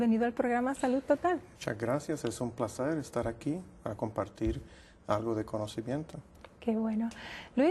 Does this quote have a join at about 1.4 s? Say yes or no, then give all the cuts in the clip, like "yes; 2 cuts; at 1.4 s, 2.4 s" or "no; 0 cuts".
yes; 1 cut; at 1.4 s